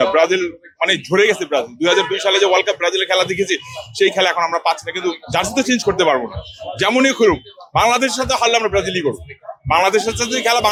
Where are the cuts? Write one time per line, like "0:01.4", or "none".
none